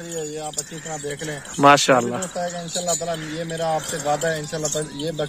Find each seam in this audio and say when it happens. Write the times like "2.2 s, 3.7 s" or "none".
none